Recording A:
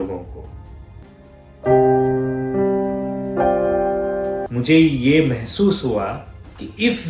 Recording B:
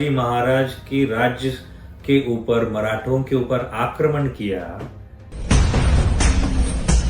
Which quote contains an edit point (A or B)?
A